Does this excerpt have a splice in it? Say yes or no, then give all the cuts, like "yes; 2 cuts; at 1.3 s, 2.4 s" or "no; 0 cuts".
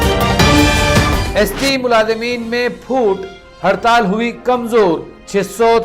yes; 1 cut; at 1.2 s